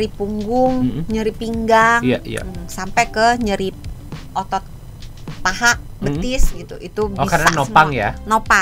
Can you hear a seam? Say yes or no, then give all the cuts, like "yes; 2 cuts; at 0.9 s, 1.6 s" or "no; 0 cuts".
no; 0 cuts